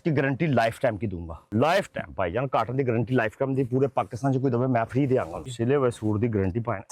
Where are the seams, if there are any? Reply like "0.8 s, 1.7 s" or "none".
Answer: 1.5 s, 5.4 s